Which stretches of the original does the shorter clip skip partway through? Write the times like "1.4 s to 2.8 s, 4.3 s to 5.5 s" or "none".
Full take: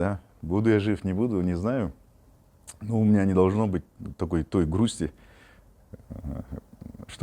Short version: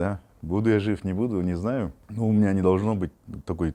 2.0 s to 2.7 s

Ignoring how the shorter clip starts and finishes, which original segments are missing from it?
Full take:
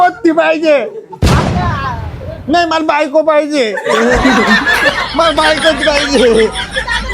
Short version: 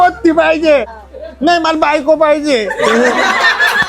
1.0 s to 2.1 s

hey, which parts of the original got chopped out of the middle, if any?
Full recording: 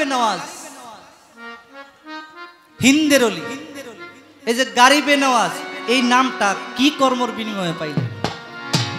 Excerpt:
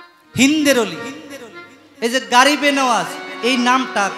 none

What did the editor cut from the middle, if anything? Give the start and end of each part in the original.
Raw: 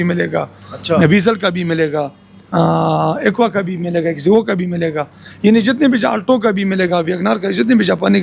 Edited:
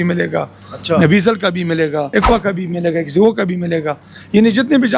2.1 s to 3.2 s

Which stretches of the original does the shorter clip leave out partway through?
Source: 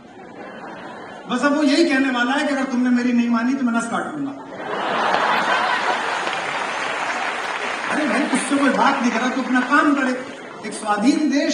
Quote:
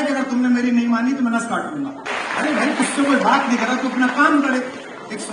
4.5 s to 7.6 s

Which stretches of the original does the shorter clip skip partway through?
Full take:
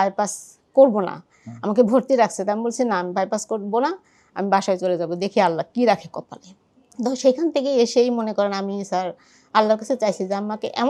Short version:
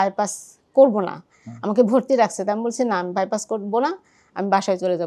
none

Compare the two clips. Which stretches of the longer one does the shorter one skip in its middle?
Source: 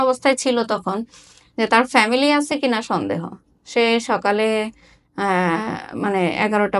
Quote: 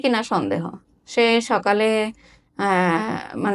none

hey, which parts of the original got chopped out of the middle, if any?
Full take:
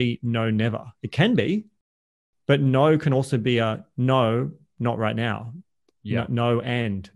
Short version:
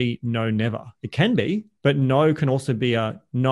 1.7 s to 2.3 s

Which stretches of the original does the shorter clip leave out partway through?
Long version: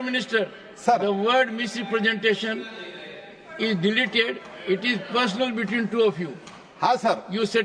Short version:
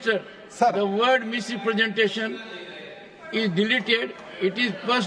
none

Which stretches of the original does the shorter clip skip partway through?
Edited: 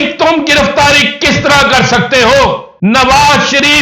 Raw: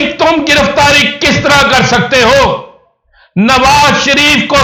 2.7 s to 3.2 s

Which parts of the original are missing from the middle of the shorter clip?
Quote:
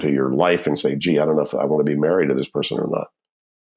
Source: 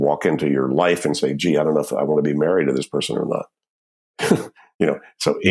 none

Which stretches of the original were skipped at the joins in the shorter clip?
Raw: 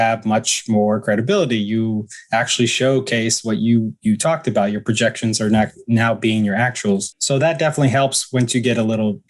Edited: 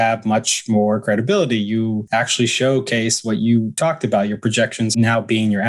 2.0 s to 2.2 s, 4.0 s to 4.2 s, 5.3 s to 5.8 s

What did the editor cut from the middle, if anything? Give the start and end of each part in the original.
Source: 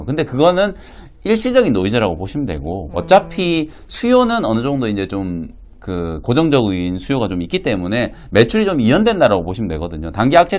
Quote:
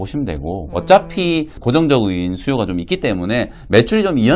3.8 s to 6.2 s

